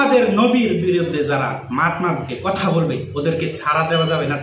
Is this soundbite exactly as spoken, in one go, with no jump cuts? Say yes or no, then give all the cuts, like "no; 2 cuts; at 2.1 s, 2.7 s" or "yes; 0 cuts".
yes; 0 cuts